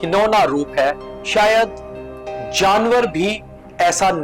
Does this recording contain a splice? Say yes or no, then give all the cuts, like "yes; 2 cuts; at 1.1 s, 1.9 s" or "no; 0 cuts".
no; 0 cuts